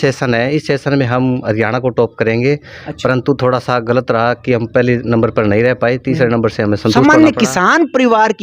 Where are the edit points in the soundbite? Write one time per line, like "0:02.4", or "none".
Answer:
0:07.0